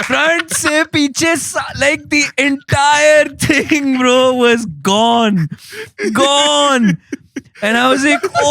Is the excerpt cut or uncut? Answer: uncut